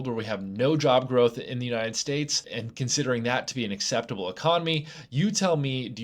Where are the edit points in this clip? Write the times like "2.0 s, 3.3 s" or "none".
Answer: 2.4 s